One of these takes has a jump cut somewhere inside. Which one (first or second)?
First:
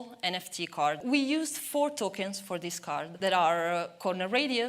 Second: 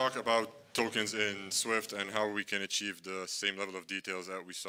first